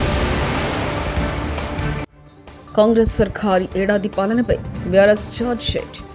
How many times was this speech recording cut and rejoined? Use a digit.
0